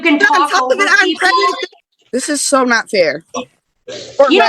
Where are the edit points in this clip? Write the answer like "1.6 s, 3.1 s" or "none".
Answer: 1.7 s